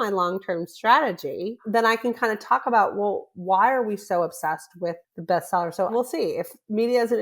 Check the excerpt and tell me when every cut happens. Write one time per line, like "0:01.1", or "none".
0:01.6
0:05.1
0:05.9

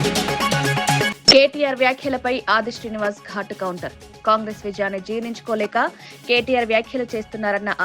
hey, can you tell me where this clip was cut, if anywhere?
0:01.1

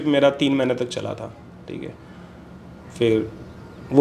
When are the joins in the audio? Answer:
none

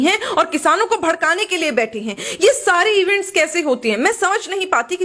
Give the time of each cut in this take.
none

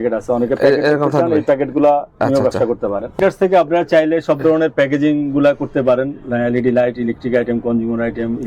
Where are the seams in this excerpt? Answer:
0:03.1

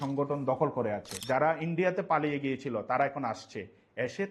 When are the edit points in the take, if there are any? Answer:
0:01.1

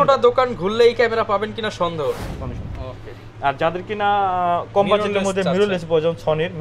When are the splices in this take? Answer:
0:02.4

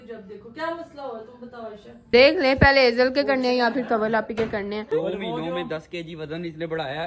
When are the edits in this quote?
0:02.1
0:04.9

